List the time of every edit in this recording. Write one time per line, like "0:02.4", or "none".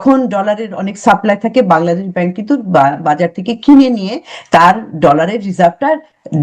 none